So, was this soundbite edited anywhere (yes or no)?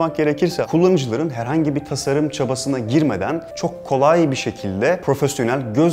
yes